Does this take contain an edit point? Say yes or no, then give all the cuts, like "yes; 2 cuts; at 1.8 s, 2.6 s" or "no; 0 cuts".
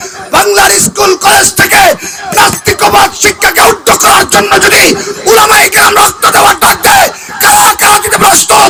no; 0 cuts